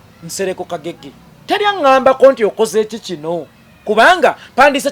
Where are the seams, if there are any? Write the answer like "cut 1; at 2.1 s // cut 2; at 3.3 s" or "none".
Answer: none